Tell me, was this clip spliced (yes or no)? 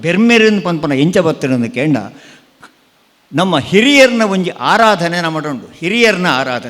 no